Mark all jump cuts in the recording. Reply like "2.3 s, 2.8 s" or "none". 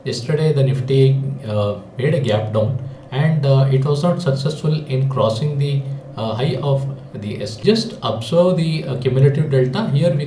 7.6 s